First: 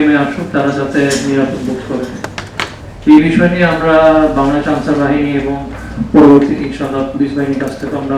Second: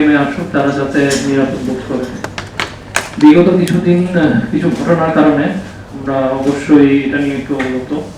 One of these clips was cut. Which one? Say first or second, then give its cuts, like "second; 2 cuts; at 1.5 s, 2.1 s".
first; 1 cut; at 2.8 s